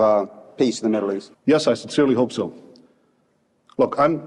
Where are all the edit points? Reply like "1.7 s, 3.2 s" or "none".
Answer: 1.3 s